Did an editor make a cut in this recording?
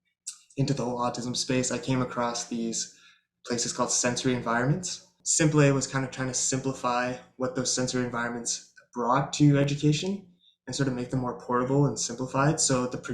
yes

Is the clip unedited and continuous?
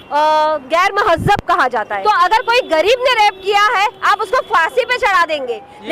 no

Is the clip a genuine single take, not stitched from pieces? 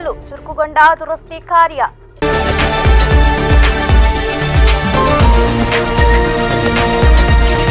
no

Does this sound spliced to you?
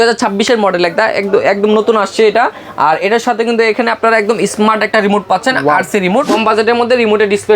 yes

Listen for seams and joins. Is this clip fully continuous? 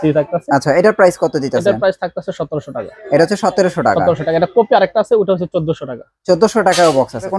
yes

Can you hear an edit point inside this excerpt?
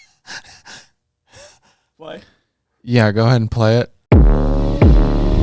yes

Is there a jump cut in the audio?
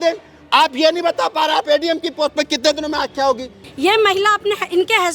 yes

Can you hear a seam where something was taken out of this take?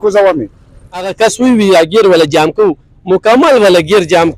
yes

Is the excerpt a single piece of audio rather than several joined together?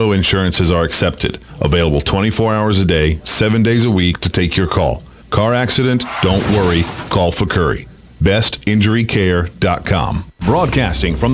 no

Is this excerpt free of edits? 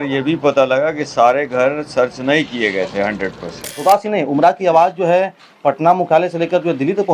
no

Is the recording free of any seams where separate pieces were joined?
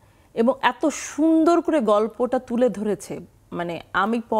yes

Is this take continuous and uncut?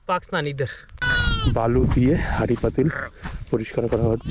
no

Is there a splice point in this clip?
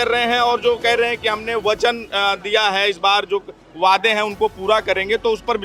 no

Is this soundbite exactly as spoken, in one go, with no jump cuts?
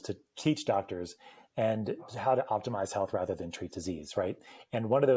no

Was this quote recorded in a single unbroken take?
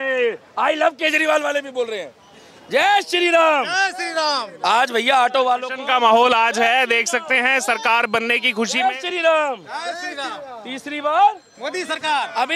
yes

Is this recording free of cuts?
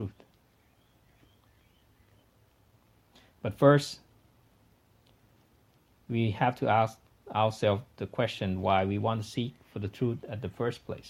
no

